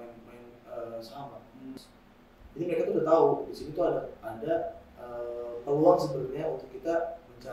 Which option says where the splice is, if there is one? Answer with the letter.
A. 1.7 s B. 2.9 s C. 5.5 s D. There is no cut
A